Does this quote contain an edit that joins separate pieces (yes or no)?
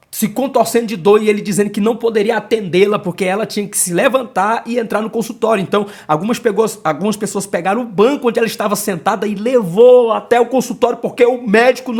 no